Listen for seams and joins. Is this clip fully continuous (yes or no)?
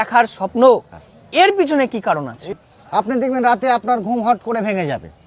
no